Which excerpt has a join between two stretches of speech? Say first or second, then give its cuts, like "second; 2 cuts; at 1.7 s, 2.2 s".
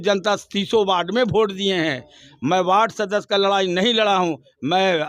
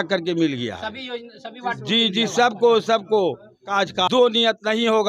second; 1 cut; at 3.7 s